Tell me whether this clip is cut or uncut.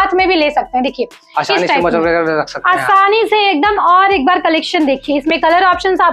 uncut